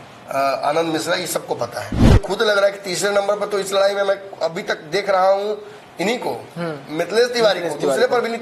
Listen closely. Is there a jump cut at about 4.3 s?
no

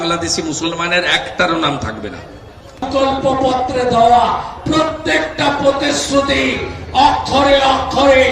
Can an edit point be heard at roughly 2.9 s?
yes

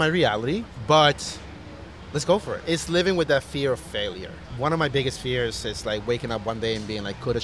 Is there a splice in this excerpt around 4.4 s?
yes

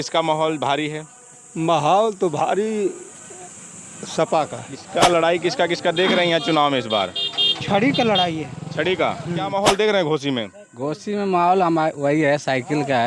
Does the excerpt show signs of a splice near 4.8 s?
yes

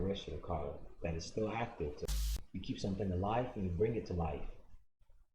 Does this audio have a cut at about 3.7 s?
no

